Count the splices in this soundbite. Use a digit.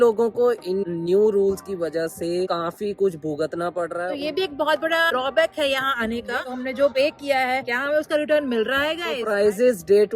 3